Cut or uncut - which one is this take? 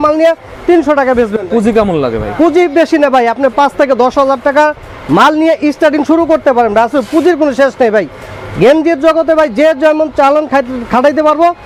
uncut